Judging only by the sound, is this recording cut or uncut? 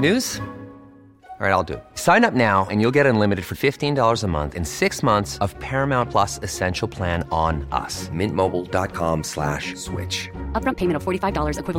uncut